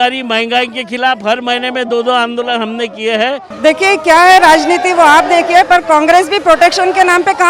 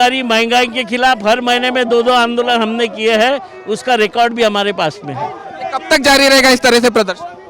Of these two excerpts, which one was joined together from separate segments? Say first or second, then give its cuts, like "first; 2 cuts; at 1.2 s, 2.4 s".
first; 1 cut; at 3.5 s